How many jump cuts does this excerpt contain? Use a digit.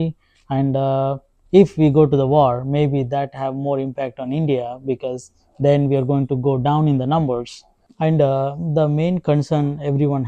1